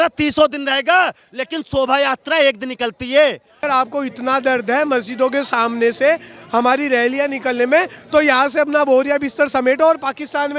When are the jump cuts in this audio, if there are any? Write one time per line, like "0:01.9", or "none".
0:03.6

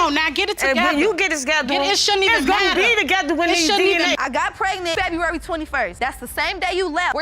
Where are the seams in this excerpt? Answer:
0:04.2

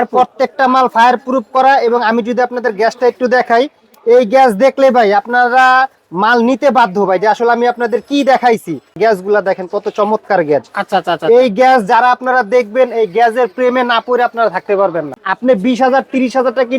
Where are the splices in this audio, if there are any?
0:09.0
0:15.1

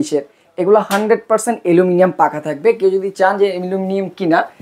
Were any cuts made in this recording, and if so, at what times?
none

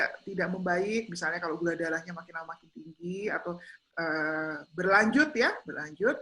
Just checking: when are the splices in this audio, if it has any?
none

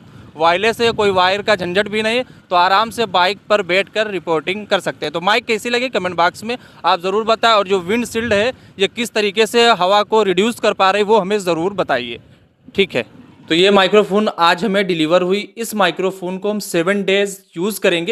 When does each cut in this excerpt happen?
none

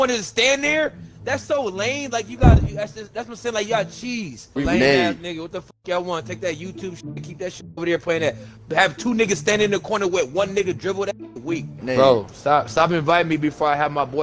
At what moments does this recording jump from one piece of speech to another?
0:04.6
0:11.8

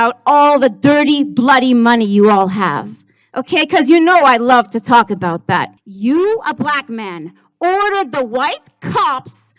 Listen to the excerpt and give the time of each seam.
0:05.8

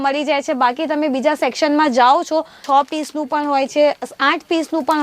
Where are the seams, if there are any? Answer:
0:02.6

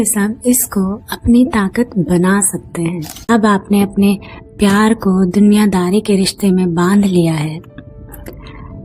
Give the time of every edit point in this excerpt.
0:03.1

